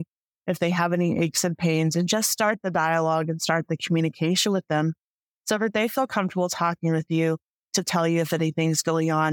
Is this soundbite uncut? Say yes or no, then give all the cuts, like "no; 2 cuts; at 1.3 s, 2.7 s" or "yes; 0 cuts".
yes; 0 cuts